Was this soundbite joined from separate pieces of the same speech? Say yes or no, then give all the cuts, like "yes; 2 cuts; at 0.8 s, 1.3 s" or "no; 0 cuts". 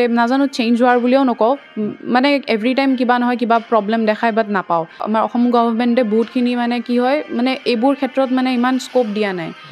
yes; 1 cut; at 5.3 s